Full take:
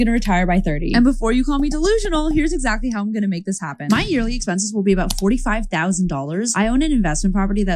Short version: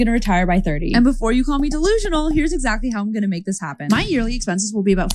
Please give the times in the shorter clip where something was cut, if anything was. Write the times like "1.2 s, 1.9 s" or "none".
none